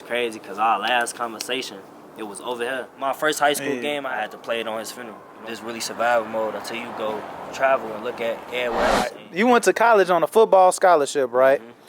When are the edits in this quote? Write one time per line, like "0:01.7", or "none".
0:02.9
0:04.1
0:05.3
0:09.2